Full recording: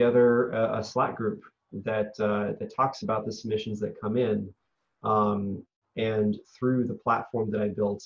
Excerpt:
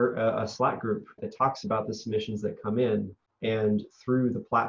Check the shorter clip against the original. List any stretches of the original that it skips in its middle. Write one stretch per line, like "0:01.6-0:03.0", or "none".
0:01.6-0:02.6
0:04.6-0:05.8